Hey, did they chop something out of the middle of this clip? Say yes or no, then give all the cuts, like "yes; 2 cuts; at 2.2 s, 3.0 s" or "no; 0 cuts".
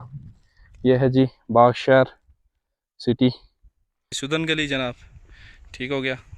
yes; 1 cut; at 4.2 s